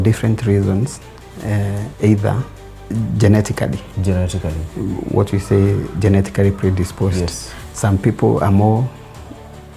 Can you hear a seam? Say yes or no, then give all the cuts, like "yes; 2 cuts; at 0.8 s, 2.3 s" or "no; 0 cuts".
no; 0 cuts